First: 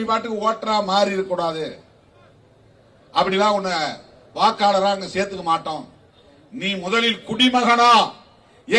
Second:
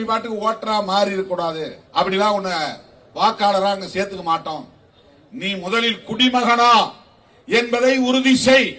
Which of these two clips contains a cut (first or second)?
second